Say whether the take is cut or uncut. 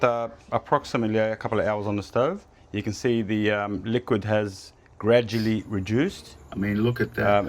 cut